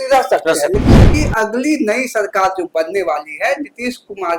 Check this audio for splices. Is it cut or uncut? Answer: cut